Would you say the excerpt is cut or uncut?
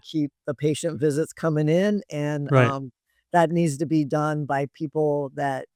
uncut